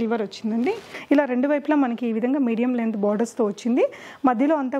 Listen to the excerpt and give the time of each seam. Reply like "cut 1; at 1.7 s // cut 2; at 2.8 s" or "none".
cut 1; at 0.9 s